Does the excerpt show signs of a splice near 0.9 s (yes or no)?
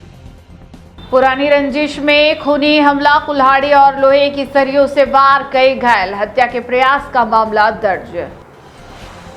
yes